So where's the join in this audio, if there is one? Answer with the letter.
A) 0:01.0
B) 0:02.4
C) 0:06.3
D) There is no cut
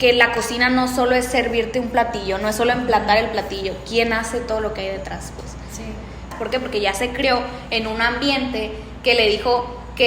C